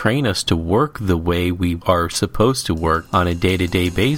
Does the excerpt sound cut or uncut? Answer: cut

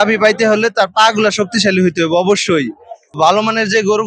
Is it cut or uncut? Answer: cut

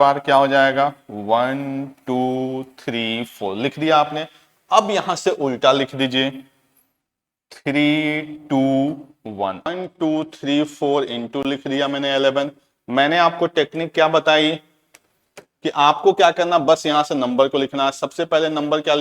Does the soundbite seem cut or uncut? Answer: cut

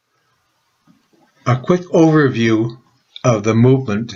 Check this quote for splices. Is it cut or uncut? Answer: uncut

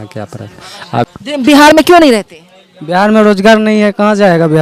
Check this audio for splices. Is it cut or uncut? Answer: cut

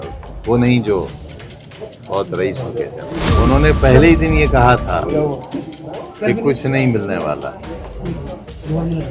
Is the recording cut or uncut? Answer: cut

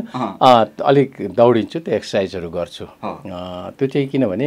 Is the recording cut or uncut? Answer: uncut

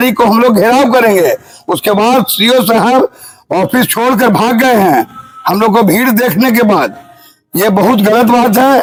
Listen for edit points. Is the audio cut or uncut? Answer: uncut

